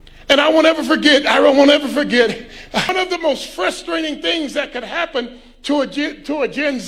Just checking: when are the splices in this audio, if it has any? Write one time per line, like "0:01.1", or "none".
0:02.9

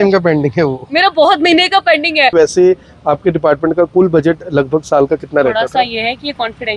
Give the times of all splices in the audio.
0:02.3

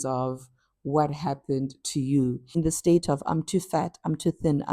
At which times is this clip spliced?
0:02.4

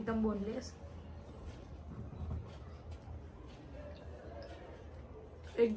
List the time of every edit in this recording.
none

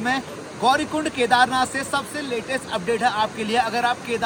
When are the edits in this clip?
none

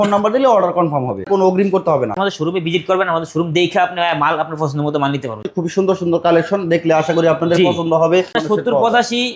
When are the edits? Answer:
0:01.3
0:02.2
0:05.5
0:08.4

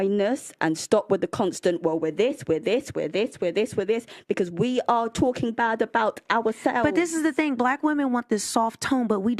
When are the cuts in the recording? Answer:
0:06.8

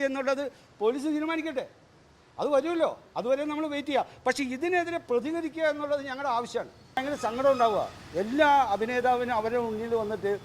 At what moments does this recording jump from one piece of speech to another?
0:07.0

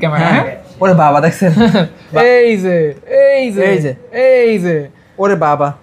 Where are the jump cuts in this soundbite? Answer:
0:02.0

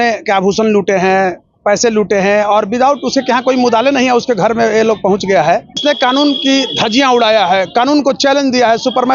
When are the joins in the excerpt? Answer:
0:05.8

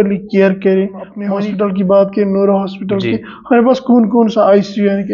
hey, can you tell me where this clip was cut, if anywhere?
0:01.2

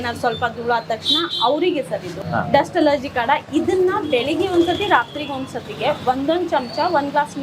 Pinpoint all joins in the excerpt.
0:02.2

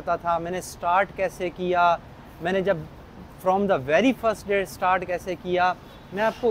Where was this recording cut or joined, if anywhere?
none

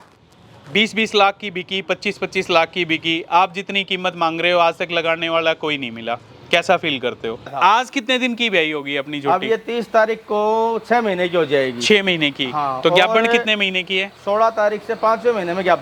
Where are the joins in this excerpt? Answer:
0:07.5

